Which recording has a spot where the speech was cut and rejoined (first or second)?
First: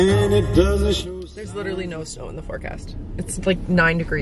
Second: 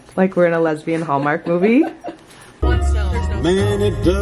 second